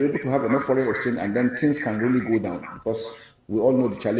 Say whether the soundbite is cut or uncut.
uncut